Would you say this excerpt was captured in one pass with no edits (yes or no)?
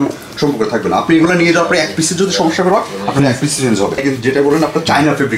no